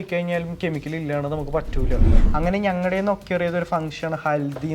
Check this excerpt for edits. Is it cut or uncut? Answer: cut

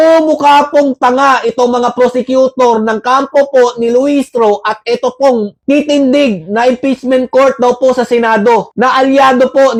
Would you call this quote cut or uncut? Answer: uncut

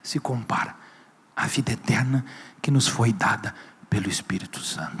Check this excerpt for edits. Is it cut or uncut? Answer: uncut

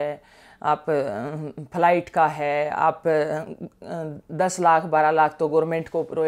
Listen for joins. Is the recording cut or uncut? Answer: uncut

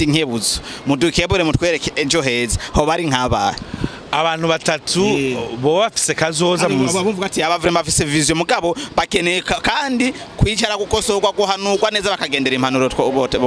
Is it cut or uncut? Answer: uncut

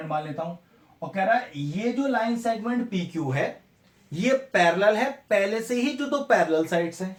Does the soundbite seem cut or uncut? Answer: uncut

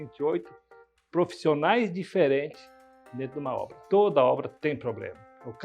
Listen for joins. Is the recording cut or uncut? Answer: cut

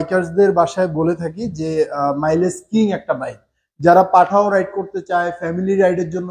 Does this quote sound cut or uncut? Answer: uncut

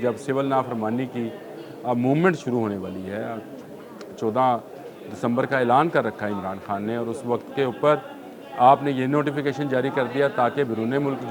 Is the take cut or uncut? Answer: uncut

